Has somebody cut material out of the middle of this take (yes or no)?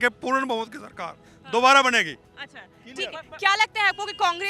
no